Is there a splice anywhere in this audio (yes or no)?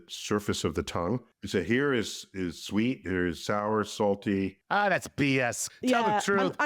yes